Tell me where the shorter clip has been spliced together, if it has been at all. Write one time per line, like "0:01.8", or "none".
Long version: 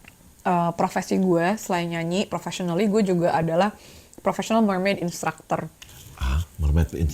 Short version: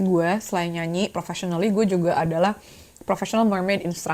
none